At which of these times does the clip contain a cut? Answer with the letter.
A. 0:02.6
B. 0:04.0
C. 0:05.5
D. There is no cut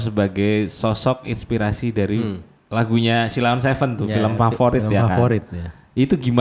D